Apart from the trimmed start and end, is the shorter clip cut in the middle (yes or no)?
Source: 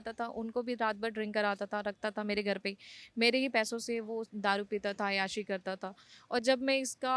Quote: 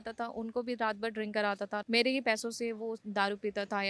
yes